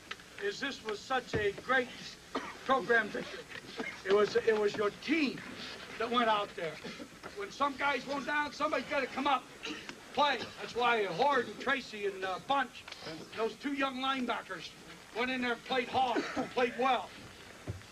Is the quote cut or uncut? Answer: uncut